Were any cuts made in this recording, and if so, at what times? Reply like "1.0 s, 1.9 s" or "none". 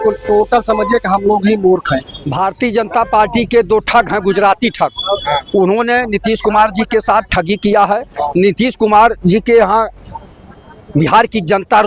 2.2 s

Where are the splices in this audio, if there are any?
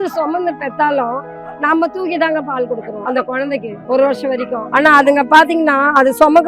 3.4 s, 4.6 s

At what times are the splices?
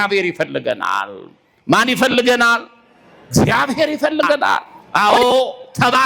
4.8 s

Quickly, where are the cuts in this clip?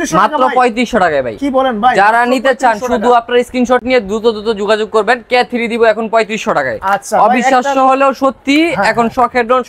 none

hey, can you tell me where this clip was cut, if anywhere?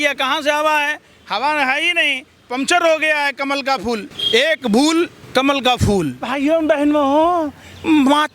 4.1 s, 5.2 s, 6.2 s

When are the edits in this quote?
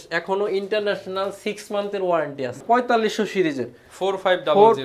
2.6 s

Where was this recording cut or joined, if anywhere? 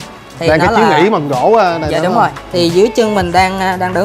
2.4 s

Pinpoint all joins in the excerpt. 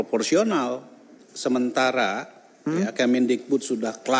1.2 s

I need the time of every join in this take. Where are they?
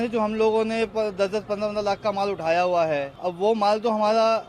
3.1 s

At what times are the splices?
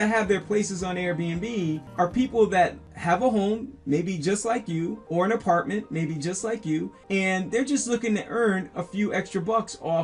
1.9 s, 2.9 s, 5.0 s, 7.0 s

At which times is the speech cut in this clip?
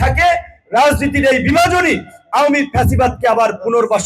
none

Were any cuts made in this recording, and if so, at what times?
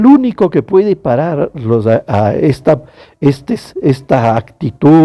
none

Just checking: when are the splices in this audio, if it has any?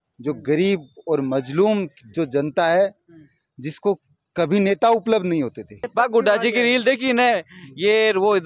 5.8 s

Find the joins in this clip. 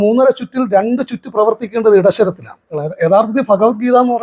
2.8 s

